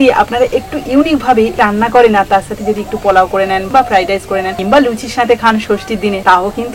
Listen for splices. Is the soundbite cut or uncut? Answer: cut